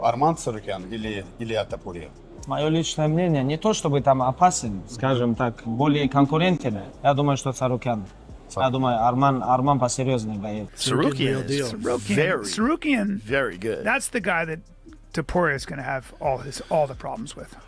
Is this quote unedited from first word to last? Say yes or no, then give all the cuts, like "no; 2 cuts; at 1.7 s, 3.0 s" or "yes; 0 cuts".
no; 1 cut; at 10.7 s